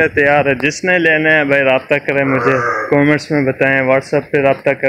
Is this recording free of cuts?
yes; 0 cuts

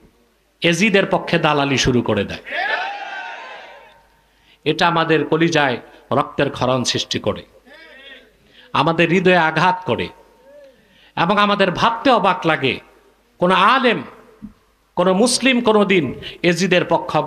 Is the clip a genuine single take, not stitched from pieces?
yes; 0 cuts

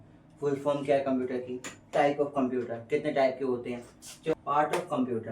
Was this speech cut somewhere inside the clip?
yes; 2 cuts; at 1.9 s, 4.3 s

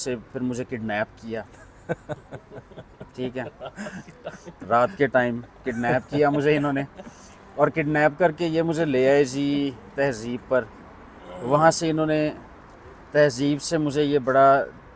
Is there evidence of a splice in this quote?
no; 0 cuts

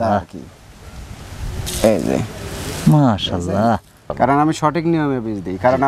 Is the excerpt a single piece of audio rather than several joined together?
no; 1 cut; at 4.0 s

